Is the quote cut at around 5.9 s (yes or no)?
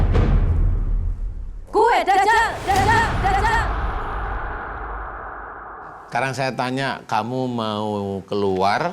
yes